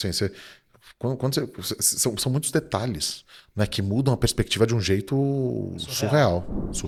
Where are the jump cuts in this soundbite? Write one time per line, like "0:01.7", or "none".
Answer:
none